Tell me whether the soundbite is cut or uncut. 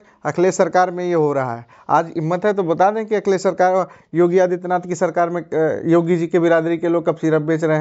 uncut